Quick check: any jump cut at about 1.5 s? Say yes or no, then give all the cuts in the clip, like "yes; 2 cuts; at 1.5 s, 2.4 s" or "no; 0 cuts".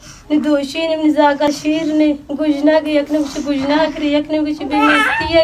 yes; 1 cut; at 1.5 s